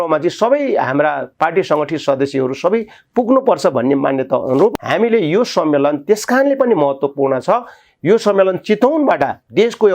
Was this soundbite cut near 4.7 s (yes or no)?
yes